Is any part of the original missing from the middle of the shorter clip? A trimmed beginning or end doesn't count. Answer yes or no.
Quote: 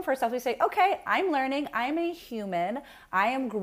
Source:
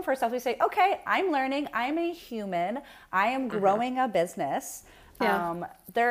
no